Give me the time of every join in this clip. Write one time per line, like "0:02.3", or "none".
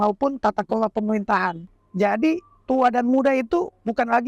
0:01.6

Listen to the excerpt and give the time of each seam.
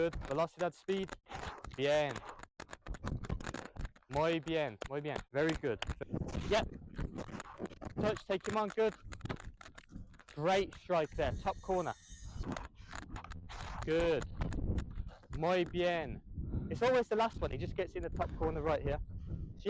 0:06.0
0:12.3

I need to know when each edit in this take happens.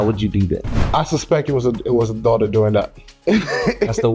0:03.0

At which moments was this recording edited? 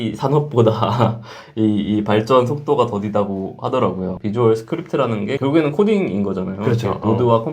0:04.2

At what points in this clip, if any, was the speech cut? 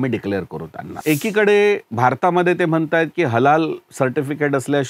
0:01.0

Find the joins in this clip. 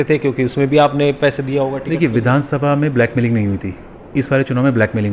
none

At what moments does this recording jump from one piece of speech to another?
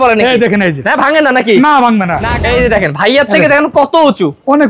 0:02.2

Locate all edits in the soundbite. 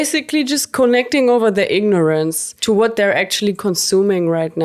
none

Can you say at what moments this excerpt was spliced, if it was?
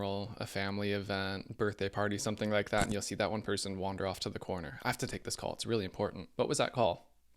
0:01.4
0:06.2

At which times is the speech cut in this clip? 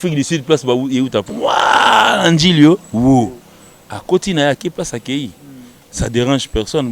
0:01.3

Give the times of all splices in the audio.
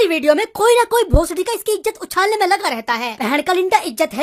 0:03.1

